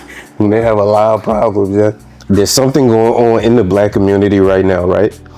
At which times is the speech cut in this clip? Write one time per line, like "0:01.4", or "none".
0:02.1